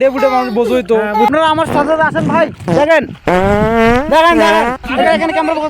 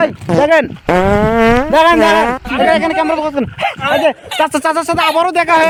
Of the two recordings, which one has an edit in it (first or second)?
first